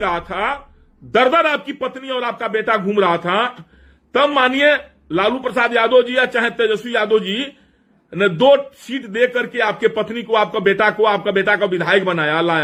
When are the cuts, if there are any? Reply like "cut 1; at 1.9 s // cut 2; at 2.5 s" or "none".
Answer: none